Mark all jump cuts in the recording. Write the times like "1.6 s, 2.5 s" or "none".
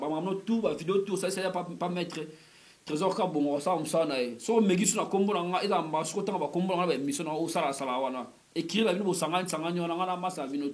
none